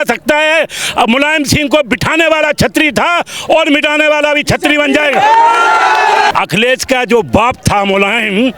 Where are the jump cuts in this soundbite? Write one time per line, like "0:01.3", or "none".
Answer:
0:06.3